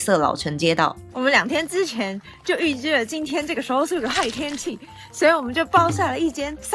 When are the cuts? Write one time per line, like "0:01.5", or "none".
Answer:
0:01.0